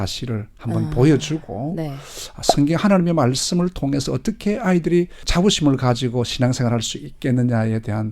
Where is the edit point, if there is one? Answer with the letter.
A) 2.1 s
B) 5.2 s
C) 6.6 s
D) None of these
B